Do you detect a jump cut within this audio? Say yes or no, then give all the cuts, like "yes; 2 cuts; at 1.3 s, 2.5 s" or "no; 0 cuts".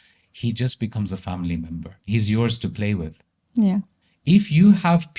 yes; 1 cut; at 1.9 s